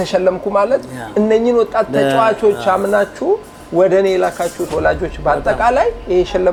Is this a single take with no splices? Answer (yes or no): yes